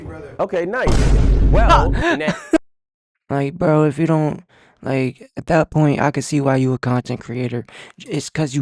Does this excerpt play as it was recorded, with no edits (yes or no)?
no